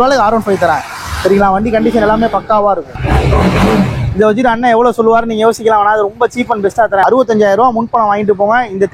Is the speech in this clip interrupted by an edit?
yes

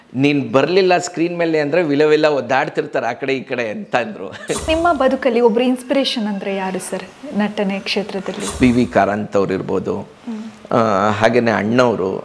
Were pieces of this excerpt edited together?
yes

